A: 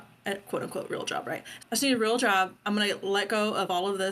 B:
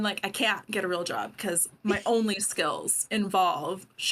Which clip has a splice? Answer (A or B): A